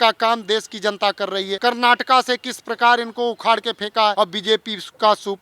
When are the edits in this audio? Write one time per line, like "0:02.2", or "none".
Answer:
0:01.5
0:04.1